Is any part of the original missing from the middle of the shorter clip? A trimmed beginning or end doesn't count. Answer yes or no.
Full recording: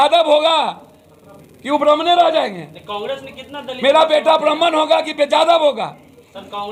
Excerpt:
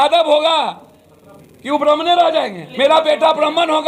yes